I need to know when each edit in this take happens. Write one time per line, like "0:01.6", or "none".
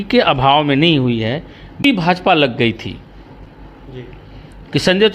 0:01.8